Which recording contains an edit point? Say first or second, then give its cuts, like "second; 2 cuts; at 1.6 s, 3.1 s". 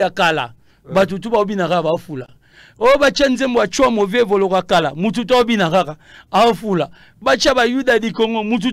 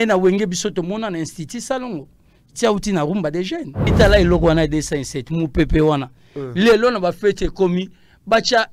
second; 1 cut; at 3.9 s